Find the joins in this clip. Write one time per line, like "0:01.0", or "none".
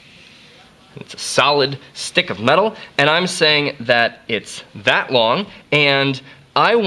0:01.0